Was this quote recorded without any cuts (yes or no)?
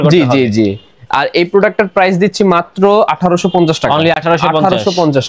yes